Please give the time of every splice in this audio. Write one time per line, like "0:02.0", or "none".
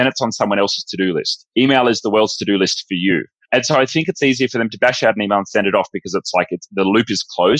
0:01.4